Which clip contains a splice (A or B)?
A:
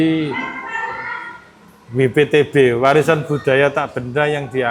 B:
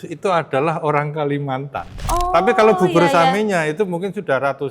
B